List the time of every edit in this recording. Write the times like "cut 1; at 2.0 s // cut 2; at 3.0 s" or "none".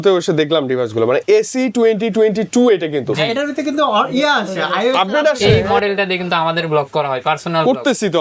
cut 1; at 5.4 s